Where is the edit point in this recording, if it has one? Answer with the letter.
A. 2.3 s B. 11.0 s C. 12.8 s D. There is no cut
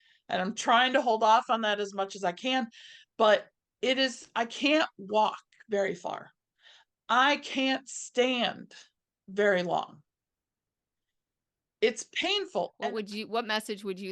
C